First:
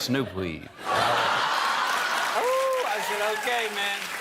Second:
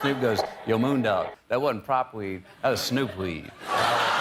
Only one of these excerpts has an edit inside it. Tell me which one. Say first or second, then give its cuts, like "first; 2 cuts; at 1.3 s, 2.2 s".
first; 1 cut; at 2.3 s